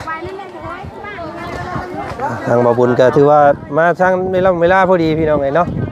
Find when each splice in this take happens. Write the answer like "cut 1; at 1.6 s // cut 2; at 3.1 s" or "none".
none